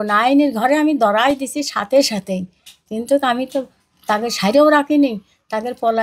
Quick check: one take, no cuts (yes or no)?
yes